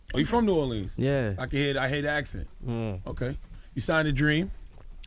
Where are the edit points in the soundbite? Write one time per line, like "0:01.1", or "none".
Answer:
0:01.8